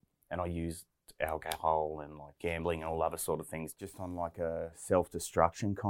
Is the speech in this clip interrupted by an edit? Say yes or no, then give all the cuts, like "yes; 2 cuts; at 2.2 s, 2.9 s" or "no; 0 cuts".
yes; 1 cut; at 3.8 s